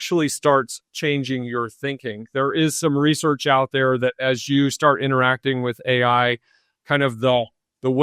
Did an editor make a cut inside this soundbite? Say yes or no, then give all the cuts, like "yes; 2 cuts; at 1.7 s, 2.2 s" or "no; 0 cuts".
no; 0 cuts